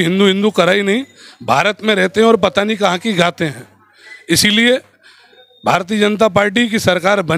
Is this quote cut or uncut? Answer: uncut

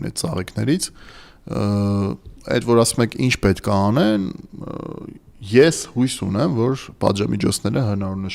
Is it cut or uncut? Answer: uncut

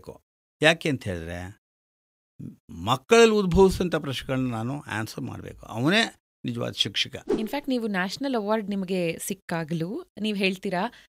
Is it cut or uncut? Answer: cut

